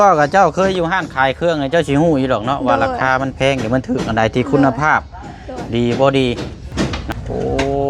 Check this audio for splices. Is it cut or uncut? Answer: cut